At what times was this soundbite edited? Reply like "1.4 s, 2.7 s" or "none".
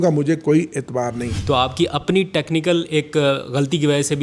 1.3 s